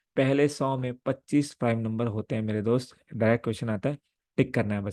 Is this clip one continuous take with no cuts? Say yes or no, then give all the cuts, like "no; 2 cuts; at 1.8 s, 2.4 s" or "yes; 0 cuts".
yes; 0 cuts